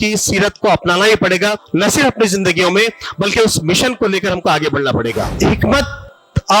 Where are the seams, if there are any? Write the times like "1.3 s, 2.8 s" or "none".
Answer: 1.6 s, 5.3 s